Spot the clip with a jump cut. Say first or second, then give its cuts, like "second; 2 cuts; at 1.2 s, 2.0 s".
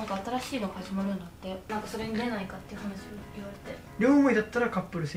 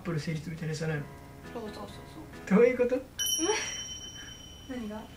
first; 2 cuts; at 1.6 s, 3.9 s